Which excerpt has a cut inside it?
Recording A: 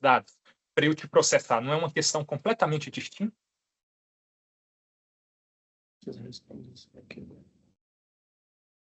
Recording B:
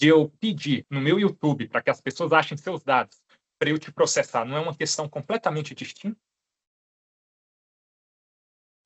B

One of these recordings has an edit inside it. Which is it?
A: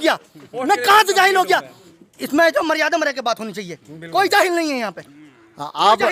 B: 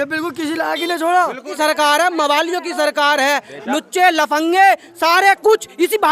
B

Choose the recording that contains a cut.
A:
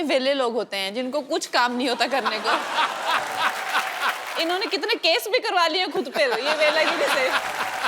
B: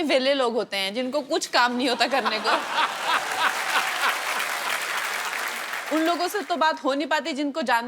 A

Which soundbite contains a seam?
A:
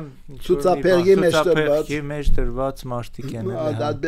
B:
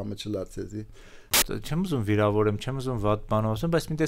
B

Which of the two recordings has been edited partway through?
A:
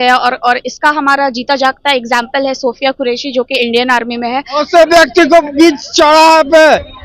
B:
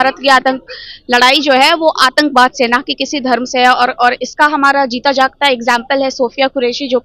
A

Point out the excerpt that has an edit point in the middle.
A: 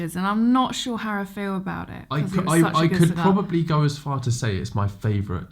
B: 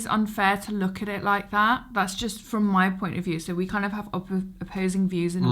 A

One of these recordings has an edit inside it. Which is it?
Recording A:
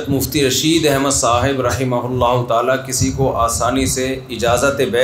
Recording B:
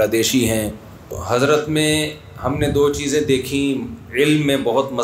B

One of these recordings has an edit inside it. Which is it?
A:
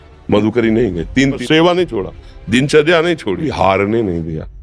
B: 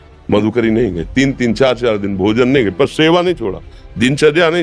A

